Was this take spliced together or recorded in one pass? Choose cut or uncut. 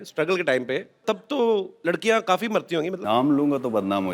cut